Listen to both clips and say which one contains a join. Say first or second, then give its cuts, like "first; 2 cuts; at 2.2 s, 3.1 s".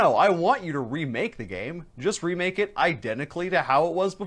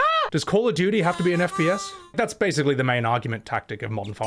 second; 1 cut; at 2.1 s